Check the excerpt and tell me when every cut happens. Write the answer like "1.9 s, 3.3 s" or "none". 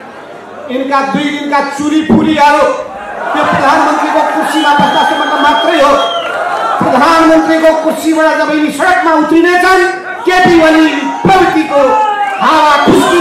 none